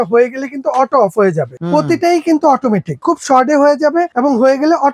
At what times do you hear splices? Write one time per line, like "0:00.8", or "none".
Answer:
0:01.5
0:03.0
0:04.1